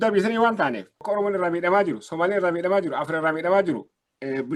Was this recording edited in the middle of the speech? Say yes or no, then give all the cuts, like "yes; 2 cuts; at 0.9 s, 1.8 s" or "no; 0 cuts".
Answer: yes; 1 cut; at 0.9 s